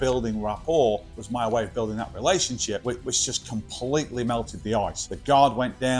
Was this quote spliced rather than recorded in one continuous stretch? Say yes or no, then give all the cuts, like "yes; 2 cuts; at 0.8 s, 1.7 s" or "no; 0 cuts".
yes; 3 cuts; at 1.2 s, 2.8 s, 5.1 s